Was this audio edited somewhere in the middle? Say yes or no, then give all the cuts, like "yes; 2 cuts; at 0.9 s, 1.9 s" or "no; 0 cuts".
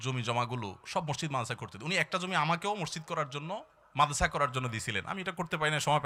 no; 0 cuts